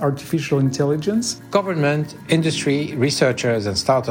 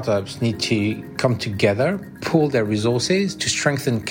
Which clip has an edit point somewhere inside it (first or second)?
first